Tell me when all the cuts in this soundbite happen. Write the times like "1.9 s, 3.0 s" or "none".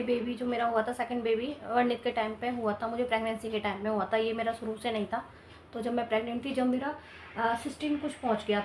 none